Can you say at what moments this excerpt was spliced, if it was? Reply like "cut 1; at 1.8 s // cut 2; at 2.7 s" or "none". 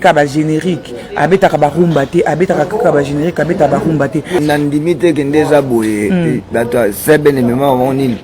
cut 1; at 4.4 s

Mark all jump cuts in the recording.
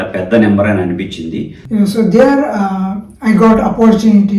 cut 1; at 1.5 s

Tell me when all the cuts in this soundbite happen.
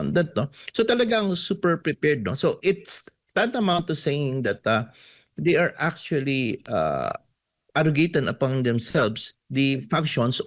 none

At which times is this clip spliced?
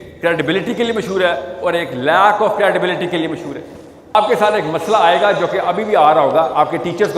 cut 1; at 4.1 s

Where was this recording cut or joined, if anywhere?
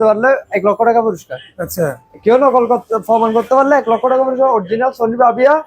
none

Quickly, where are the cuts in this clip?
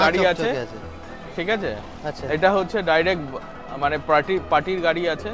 none

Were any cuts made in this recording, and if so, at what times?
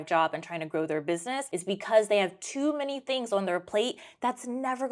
cut 1; at 1.4 s

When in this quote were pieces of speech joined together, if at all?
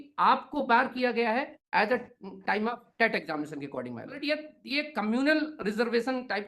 cut 1; at 4.1 s

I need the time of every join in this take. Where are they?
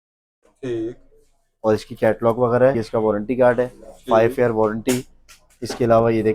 cut 1; at 2.8 s

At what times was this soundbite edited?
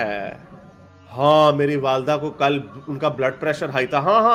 none

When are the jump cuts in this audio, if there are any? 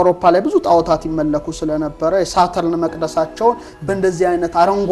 none

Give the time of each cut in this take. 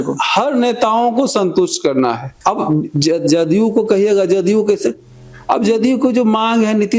cut 1; at 2.3 s

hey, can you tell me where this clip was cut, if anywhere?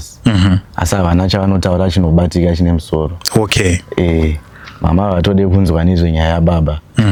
none

